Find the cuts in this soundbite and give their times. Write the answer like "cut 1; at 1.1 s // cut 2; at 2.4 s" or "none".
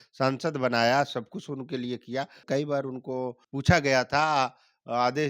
cut 1; at 2.4 s